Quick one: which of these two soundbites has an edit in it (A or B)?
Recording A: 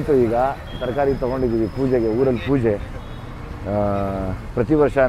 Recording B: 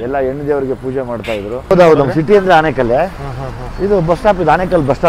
B